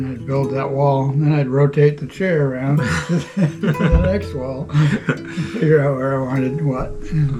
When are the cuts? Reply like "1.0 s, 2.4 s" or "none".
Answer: none